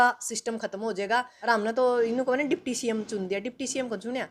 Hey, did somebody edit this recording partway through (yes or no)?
yes